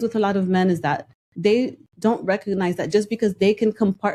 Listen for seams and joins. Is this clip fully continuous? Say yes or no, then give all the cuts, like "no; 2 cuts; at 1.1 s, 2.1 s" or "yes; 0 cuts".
yes; 0 cuts